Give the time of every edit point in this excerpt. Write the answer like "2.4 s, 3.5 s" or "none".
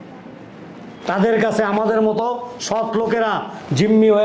none